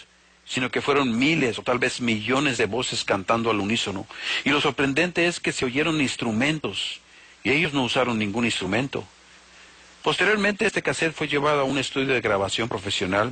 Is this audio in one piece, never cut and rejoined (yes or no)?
no